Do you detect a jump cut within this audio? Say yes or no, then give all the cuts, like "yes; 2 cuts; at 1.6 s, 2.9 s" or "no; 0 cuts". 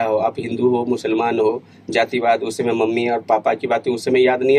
no; 0 cuts